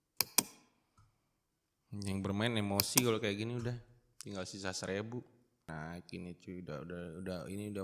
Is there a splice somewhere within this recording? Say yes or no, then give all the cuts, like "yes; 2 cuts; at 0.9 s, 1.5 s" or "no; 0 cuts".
yes; 1 cut; at 5.7 s